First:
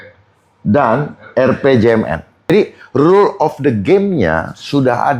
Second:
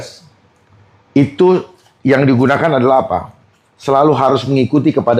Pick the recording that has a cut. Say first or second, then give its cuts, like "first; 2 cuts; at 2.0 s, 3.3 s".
first; 1 cut; at 2.5 s